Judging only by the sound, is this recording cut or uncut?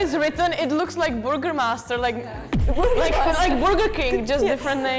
uncut